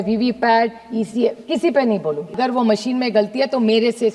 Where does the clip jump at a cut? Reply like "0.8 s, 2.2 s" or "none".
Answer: 2.4 s